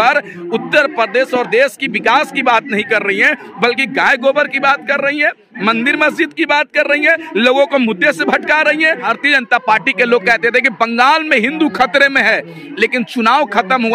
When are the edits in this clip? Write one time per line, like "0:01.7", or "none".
0:09.1